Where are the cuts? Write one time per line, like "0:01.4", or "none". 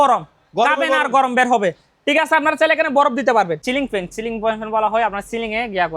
0:03.6